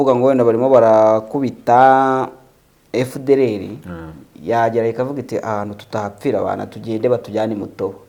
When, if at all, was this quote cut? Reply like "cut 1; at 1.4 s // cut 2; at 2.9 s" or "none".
none